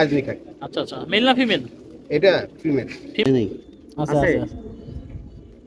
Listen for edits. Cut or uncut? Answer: cut